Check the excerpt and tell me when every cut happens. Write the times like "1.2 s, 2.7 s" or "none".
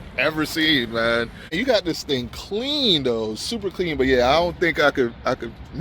1.6 s